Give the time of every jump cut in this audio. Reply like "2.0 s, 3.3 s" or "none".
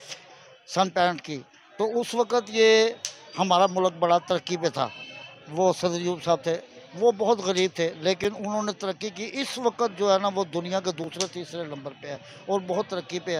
none